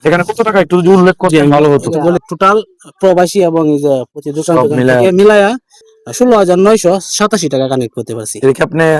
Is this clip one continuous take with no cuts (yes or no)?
no